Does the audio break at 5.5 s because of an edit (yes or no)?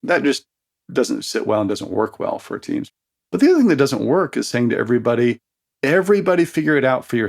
no